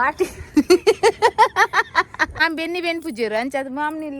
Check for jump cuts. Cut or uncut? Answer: cut